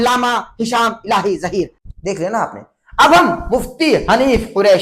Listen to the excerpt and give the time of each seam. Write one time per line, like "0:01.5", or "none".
0:01.8

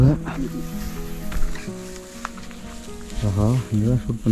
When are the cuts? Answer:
none

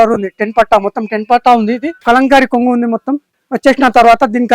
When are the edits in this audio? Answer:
none

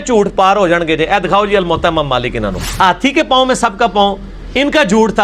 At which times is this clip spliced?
0:02.6

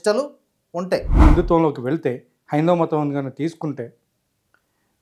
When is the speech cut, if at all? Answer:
0:01.2

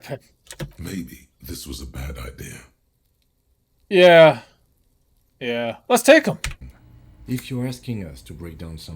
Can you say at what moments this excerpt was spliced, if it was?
0:06.5

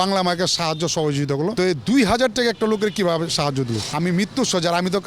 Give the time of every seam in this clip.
0:01.5
0:03.8

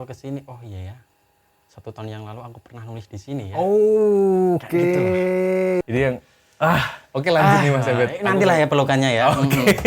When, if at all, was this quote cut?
0:05.8

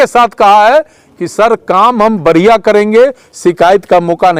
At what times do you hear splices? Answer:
none

